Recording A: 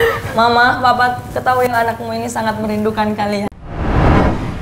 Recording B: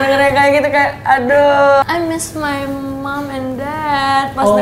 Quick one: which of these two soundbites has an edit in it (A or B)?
A